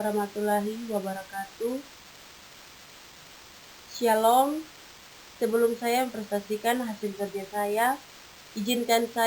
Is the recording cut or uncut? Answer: uncut